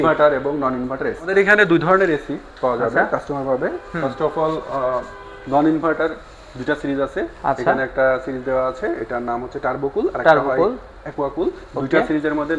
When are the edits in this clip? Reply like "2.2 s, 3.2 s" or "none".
1.3 s